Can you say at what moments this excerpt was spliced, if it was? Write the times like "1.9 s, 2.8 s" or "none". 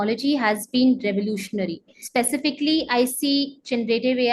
2.0 s